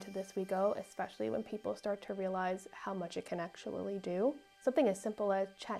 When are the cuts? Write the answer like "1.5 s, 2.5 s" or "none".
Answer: 4.5 s